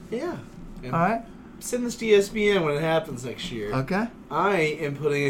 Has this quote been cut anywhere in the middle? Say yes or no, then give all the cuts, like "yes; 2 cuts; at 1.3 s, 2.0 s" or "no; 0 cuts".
yes; 1 cut; at 4.2 s